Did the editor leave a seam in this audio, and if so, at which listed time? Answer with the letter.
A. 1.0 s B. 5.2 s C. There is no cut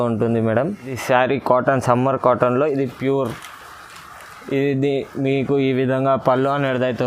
A